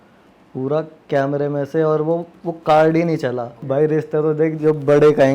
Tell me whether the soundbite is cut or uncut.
cut